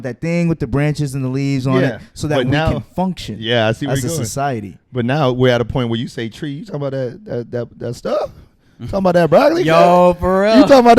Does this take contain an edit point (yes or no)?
no